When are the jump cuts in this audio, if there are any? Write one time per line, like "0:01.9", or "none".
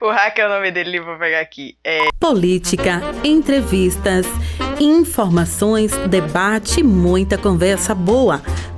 0:02.0